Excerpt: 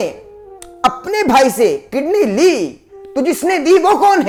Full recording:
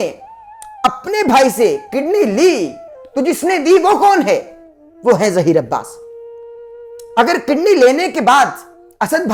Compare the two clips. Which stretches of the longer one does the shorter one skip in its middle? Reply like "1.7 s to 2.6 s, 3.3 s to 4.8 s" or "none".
none